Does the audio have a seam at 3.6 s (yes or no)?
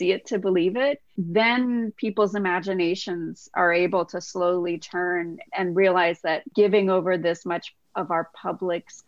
no